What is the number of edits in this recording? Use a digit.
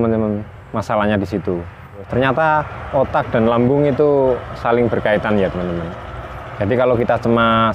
1